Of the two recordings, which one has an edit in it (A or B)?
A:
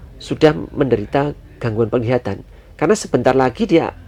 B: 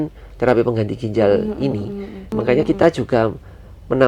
B